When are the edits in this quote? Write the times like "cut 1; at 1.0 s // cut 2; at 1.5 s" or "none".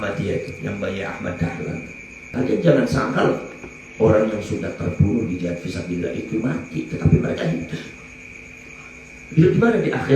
cut 1; at 2.3 s